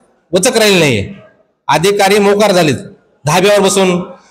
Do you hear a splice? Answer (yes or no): no